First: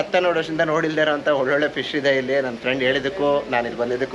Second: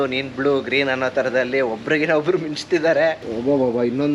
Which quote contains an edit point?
second; 1 cut; at 3.2 s

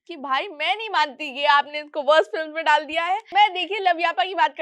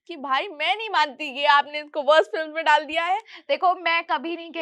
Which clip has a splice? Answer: first; 1 cut; at 3.2 s

